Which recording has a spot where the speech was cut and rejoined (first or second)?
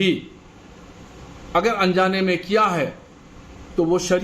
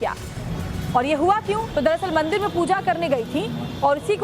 second